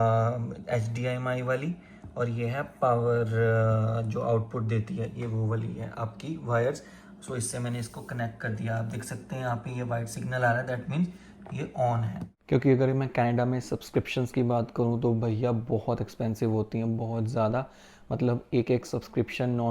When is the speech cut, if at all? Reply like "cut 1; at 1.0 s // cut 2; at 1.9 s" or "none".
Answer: cut 1; at 12.3 s